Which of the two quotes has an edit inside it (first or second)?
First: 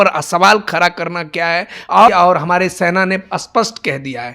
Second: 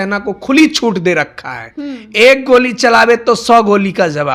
first